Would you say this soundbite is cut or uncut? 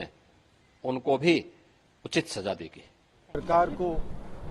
uncut